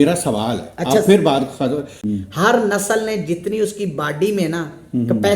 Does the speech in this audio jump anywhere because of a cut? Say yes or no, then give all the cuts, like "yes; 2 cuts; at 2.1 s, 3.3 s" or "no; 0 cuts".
yes; 1 cut; at 2.0 s